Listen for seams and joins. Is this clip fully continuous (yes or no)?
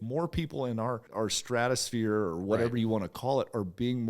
no